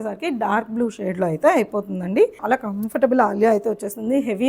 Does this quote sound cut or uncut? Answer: cut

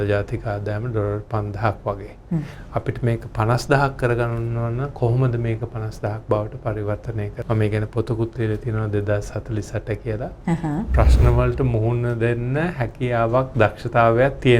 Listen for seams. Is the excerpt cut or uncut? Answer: cut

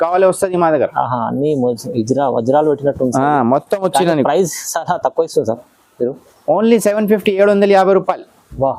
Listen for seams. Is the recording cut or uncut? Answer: uncut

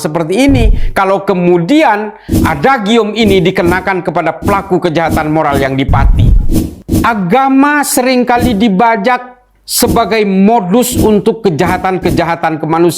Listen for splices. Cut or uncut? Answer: cut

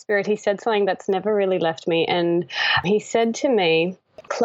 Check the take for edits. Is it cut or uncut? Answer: cut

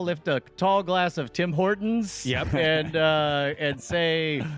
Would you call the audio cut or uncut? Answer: uncut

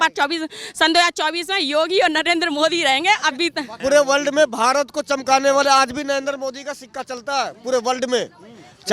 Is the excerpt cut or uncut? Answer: cut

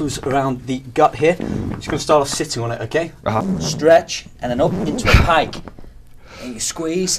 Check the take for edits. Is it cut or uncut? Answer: cut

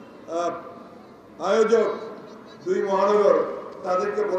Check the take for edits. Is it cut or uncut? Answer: uncut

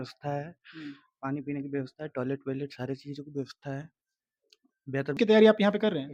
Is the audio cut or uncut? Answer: cut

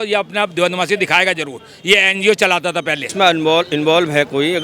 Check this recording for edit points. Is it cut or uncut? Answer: cut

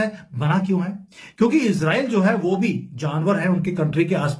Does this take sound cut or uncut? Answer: uncut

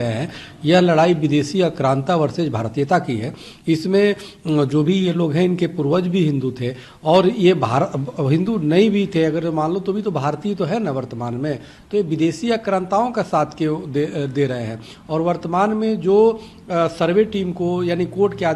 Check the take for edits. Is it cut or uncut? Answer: uncut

